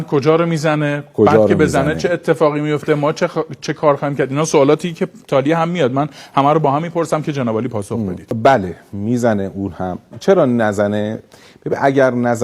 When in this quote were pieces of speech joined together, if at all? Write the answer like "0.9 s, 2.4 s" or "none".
8.3 s